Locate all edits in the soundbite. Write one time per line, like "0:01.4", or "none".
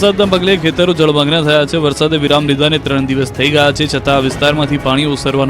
0:03.5